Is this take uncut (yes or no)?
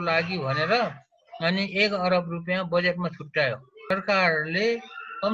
no